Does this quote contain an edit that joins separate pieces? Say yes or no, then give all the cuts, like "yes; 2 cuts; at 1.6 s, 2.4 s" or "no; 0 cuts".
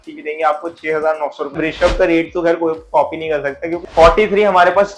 yes; 2 cuts; at 1.6 s, 3.8 s